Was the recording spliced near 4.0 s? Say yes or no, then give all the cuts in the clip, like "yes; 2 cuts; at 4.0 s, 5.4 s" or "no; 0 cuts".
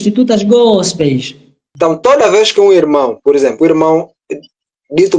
no; 1 cut; at 1.6 s